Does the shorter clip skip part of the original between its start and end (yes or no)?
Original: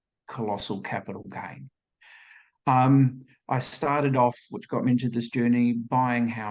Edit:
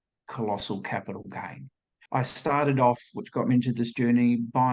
yes